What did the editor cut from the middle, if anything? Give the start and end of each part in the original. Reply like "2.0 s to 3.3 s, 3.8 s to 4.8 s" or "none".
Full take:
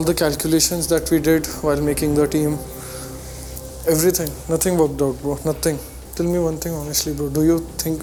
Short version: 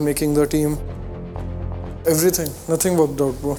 none